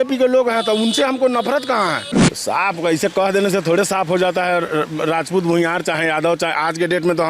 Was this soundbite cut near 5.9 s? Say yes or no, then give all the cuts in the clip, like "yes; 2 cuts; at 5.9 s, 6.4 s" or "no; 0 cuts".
no; 1 cut; at 2.1 s